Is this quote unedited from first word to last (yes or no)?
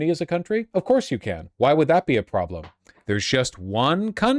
yes